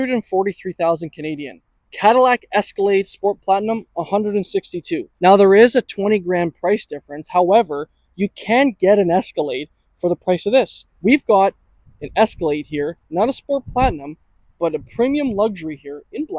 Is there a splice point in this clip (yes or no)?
yes